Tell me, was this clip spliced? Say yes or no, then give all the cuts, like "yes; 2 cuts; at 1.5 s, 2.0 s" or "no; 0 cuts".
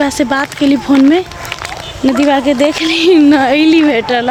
no; 0 cuts